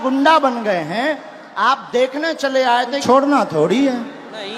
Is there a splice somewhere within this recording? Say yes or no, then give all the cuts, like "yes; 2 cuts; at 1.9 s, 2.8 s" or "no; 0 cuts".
yes; 1 cut; at 3.0 s